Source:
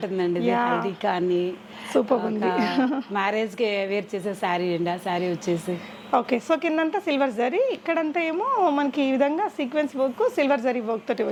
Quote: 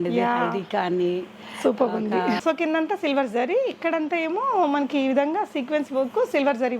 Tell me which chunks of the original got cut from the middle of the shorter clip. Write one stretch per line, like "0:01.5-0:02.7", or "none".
0:02.7-0:06.4